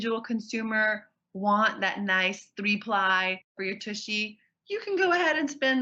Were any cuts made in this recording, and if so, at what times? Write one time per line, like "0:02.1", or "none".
0:03.5